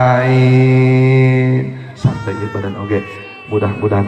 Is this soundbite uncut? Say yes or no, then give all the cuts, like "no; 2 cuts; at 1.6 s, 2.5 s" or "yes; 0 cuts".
no; 1 cut; at 1.9 s